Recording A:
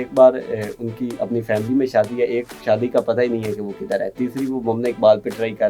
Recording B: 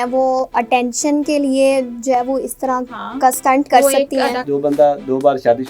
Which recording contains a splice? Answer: B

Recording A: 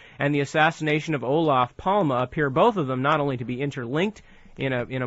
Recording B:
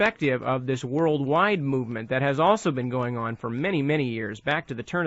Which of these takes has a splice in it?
B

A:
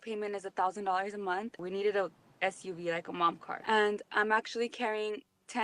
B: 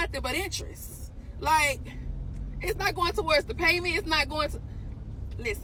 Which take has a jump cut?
A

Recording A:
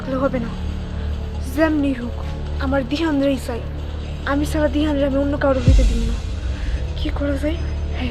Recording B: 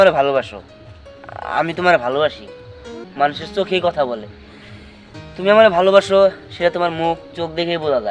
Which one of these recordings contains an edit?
B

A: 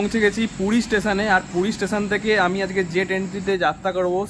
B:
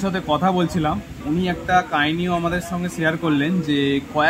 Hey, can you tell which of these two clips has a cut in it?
B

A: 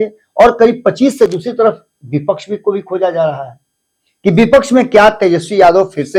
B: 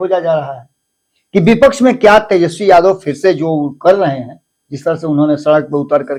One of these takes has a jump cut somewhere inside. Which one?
A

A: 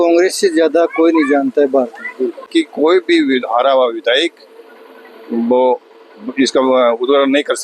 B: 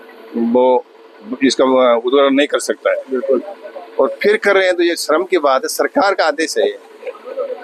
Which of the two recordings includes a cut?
A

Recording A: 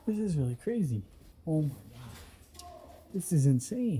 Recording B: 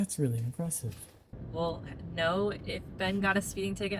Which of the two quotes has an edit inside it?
B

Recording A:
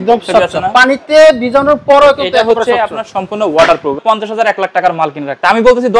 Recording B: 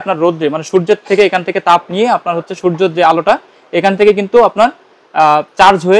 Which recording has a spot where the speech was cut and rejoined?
A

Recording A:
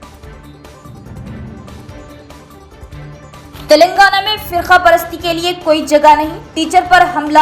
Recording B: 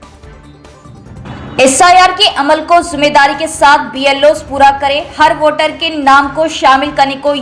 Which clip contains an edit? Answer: A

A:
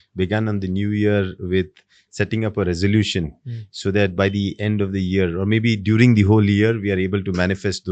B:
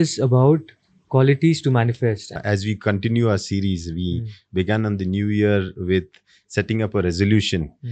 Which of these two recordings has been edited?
B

